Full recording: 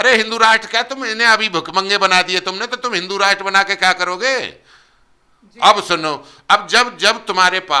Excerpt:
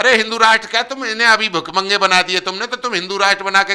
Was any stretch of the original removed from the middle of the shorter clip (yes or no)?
no